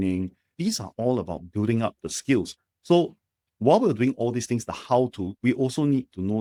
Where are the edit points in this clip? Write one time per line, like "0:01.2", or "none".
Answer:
none